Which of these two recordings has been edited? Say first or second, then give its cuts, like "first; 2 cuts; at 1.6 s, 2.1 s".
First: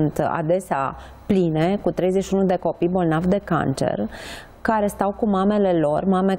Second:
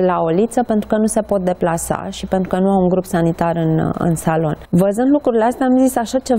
second; 1 cut; at 4.6 s